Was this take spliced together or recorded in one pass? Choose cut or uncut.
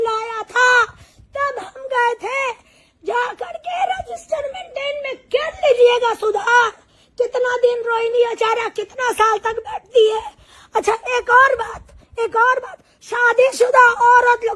uncut